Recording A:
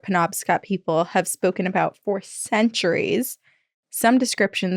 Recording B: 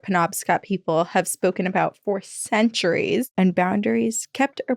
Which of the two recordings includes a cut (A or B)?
B